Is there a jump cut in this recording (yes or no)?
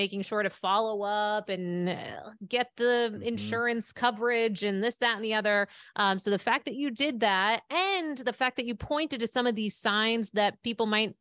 no